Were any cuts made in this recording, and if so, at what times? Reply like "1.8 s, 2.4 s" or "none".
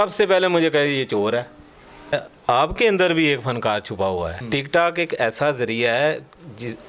2.1 s, 4.4 s